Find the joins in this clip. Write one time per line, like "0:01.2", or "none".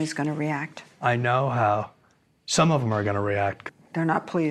0:03.6